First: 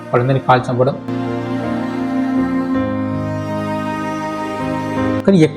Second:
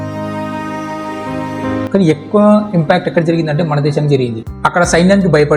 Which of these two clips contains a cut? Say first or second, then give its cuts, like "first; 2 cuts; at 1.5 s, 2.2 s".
second; 1 cut; at 4.4 s